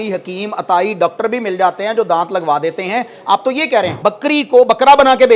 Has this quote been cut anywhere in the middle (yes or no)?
yes